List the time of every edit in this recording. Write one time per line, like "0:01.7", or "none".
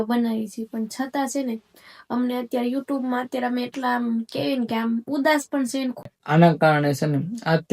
0:06.1